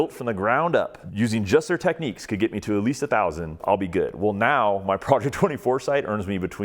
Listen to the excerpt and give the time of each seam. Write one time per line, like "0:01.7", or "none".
0:01.0
0:03.6